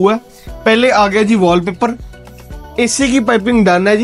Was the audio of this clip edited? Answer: no; 0 cuts

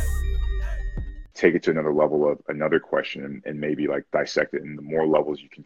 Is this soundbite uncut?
no; 1 cut; at 1.3 s

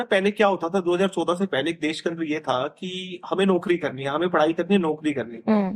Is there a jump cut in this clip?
no; 0 cuts

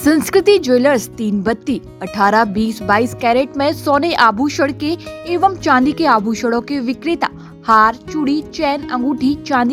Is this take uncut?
yes; 0 cuts

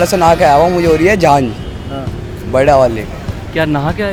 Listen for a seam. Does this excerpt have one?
no; 0 cuts

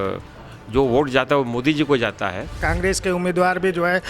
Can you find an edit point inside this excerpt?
yes; 1 cut; at 2.6 s

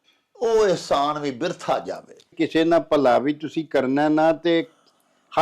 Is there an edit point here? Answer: yes; 1 cut; at 2.3 s

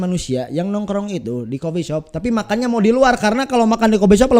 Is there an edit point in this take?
no; 0 cuts

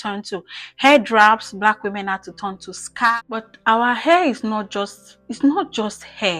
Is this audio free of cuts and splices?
no; 1 cut; at 3.1 s

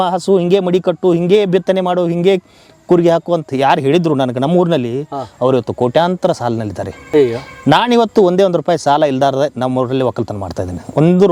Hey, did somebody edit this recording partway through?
no; 0 cuts

